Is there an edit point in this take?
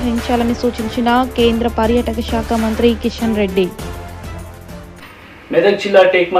yes; 1 cut; at 4.8 s

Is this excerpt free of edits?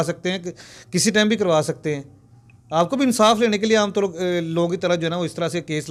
yes; 0 cuts

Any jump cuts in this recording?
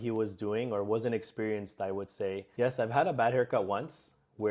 yes; 1 cut; at 2.5 s

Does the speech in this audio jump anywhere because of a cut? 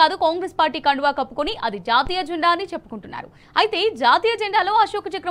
no; 0 cuts

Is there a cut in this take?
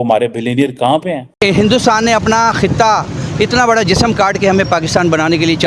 yes; 1 cut; at 1.3 s

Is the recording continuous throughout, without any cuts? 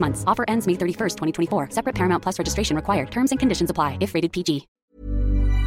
no; 1 cut; at 4.7 s

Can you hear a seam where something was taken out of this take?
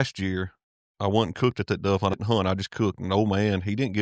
yes; 1 cut; at 2.1 s

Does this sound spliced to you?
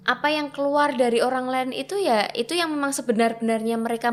no; 0 cuts

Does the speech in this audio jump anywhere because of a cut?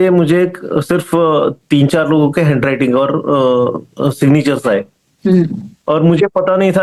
no; 0 cuts

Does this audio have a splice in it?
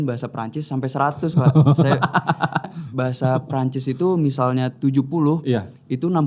yes; 1 cut; at 2.7 s

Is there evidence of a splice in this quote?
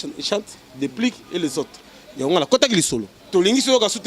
yes; 1 cut; at 3.2 s

